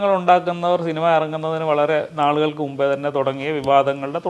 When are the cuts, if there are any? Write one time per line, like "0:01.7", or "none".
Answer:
none